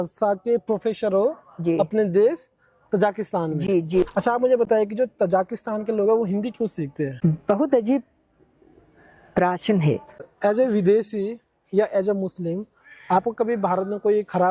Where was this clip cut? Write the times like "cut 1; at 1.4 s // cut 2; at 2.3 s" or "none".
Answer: cut 1; at 4.1 s // cut 2; at 7.1 s // cut 3; at 10.2 s